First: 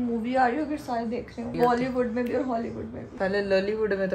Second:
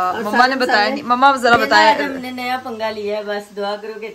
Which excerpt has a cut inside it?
first; 1 cut; at 1.5 s

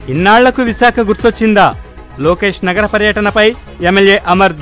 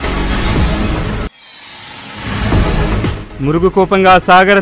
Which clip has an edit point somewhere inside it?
second; 2 cuts; at 1.3 s, 3.1 s

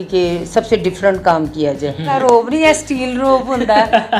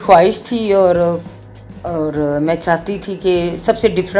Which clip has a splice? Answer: first; 1 cut; at 2.1 s

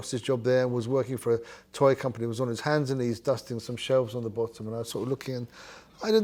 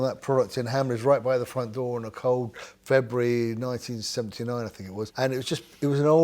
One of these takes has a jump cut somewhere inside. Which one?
second; 1 cut; at 5.1 s

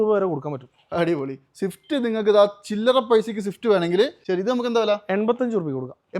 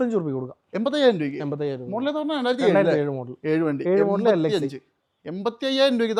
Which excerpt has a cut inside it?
first; 1 cut; at 4.2 s

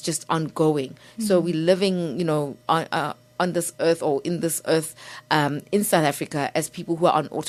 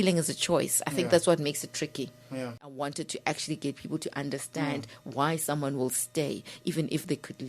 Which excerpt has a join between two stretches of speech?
second; 1 cut; at 2.7 s

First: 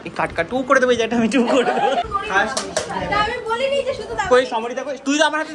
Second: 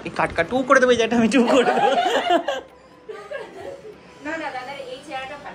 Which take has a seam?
first; 1 cut; at 2.0 s

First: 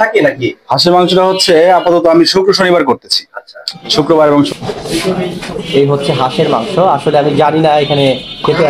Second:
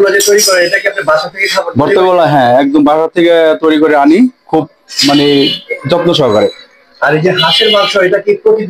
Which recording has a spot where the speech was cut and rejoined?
first; 1 cut; at 4.5 s

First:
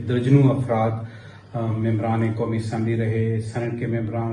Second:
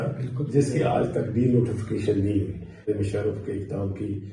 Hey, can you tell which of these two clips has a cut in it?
second; 1 cut; at 2.8 s

